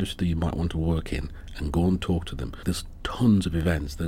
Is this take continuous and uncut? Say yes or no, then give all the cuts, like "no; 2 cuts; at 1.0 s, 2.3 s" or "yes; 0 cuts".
no; 1 cut; at 2.6 s